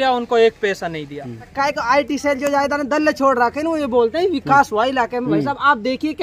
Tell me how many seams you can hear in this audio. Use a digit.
1